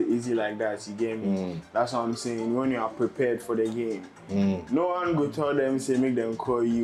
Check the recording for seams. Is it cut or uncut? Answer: uncut